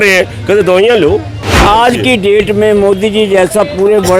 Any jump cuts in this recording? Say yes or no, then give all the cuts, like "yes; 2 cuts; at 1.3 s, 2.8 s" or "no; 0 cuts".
yes; 1 cut; at 1.6 s